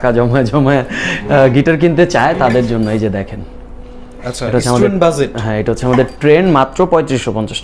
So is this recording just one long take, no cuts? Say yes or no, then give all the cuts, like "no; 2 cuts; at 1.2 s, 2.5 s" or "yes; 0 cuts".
yes; 0 cuts